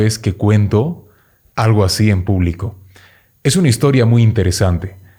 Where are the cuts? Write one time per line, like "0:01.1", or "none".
none